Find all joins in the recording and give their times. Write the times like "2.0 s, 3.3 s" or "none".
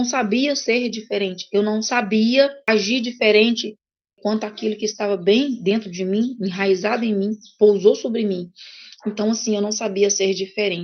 2.6 s, 4.2 s